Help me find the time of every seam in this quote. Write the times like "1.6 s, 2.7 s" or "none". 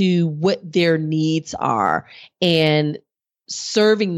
none